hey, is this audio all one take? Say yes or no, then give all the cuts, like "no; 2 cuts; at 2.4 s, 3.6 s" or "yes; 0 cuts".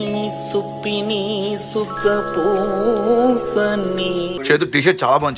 no; 1 cut; at 4.4 s